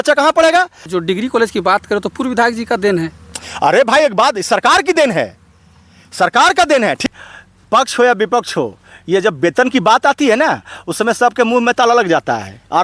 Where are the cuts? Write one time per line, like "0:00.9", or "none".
0:00.9
0:07.0